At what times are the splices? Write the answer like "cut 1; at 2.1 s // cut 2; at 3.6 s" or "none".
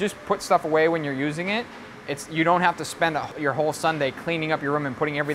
cut 1; at 3.3 s